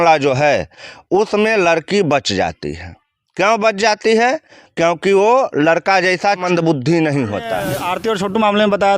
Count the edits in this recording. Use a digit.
2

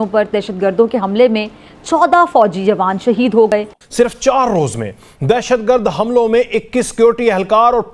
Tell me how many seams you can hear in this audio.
1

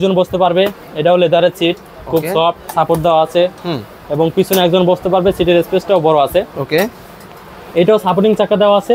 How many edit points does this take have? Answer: 0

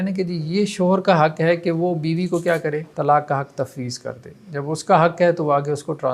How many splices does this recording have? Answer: 1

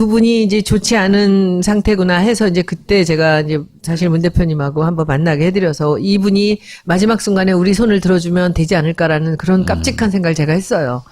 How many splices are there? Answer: 1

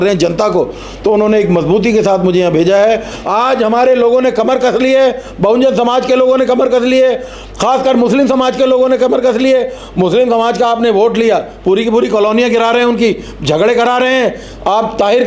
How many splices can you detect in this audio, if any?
1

